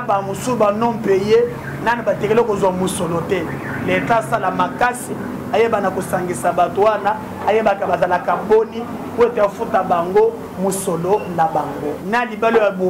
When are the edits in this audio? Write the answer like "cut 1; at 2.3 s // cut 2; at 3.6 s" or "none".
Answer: cut 1; at 12.0 s